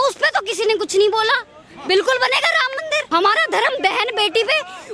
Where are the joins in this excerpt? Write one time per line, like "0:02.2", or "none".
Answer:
0:03.1